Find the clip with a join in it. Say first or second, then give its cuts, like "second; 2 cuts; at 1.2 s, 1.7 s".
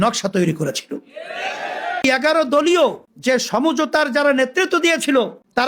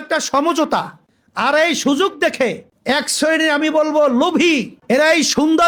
first; 2 cuts; at 2.0 s, 3.1 s